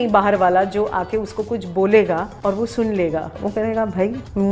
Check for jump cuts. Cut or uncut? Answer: cut